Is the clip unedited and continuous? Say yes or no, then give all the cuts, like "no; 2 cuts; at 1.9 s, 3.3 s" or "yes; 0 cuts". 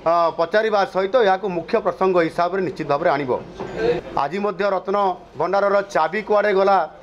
no; 1 cut; at 4.0 s